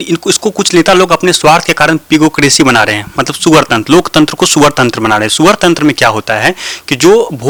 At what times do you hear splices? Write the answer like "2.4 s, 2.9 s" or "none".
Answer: none